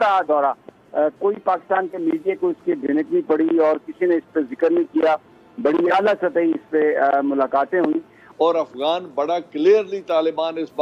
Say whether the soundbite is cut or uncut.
cut